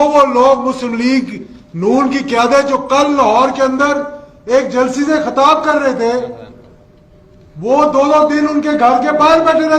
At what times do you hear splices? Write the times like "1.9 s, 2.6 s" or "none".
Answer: none